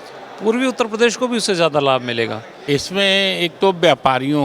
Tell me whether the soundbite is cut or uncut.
cut